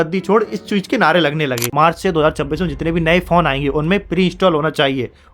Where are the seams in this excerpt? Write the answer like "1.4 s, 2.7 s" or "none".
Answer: 1.7 s